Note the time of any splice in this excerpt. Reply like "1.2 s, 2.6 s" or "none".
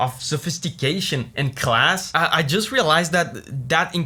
none